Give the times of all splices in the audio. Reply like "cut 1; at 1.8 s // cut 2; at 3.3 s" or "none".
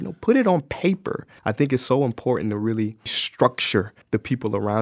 cut 1; at 1.3 s // cut 2; at 3.2 s // cut 3; at 4.0 s